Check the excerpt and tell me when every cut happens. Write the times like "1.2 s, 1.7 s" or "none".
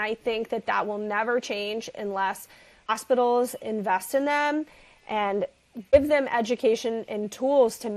2.9 s, 5.9 s